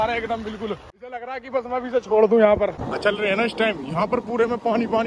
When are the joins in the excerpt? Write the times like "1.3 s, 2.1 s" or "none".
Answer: 1.3 s, 2.8 s